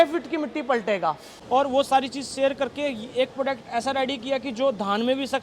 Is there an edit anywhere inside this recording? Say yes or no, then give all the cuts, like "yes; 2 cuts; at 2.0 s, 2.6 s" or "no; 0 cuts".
yes; 1 cut; at 1.3 s